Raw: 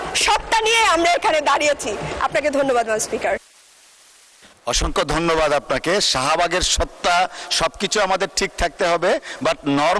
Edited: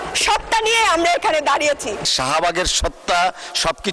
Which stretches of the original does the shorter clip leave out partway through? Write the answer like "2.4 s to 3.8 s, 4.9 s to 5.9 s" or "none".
2.1 s to 6.1 s